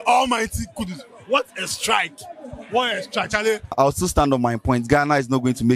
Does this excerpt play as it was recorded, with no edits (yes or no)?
no